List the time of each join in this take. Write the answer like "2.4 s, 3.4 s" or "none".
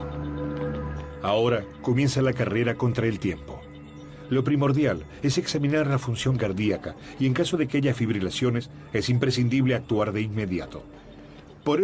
9.1 s